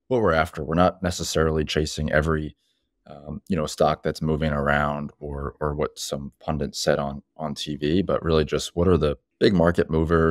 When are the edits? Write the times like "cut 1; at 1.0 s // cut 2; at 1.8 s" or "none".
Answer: cut 1; at 9.3 s